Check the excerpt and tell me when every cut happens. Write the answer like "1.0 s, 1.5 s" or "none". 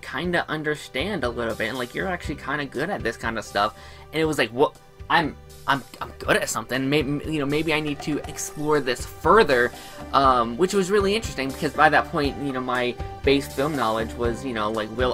none